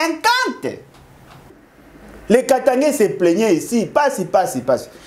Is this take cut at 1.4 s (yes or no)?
yes